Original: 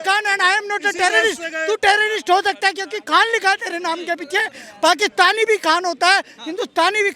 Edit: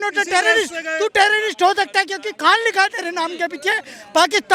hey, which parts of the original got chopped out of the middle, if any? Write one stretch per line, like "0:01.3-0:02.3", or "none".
none